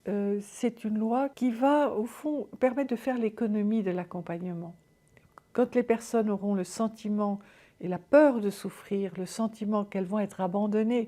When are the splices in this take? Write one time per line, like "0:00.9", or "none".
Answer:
0:01.3